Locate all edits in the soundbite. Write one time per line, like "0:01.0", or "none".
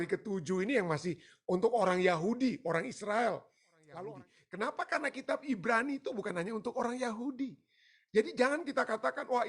0:04.1